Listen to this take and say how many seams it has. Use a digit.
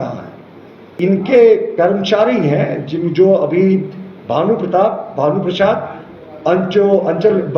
1